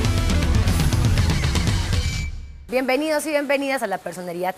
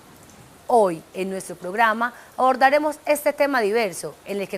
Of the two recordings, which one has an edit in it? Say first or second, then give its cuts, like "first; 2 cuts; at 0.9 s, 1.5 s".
second; 1 cut; at 3.7 s